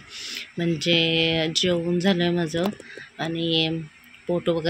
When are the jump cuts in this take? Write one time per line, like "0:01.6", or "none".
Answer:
none